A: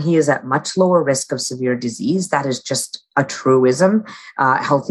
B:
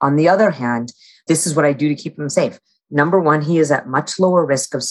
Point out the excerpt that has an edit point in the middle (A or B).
B